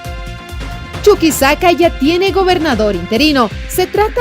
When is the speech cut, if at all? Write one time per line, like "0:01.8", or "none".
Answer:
0:01.0

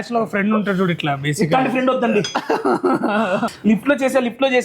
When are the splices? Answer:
0:03.5

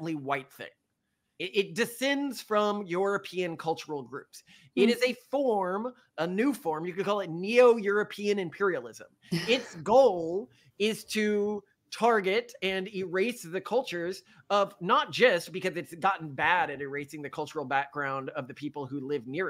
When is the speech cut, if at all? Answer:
0:01.3

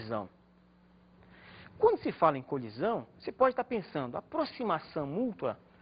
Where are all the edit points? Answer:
0:04.7

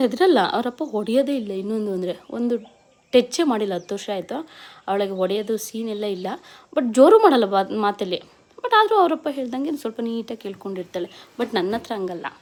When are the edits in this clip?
none

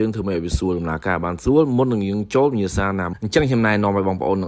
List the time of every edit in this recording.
0:03.1

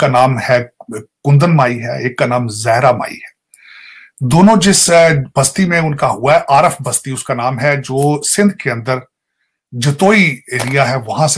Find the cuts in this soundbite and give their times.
none

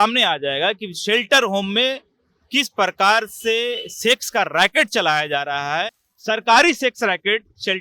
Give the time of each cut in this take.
none

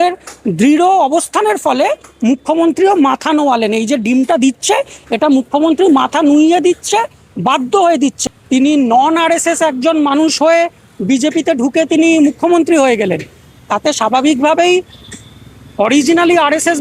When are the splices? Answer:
0:08.2

